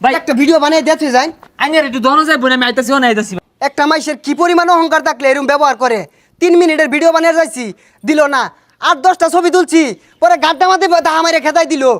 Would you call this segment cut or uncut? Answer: cut